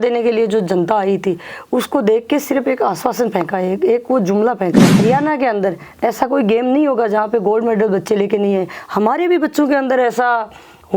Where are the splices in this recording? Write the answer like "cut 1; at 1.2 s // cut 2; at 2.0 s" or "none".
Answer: cut 1; at 4.9 s